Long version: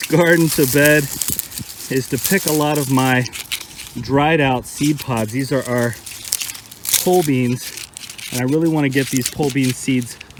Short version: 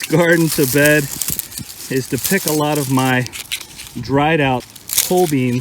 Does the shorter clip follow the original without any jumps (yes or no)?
no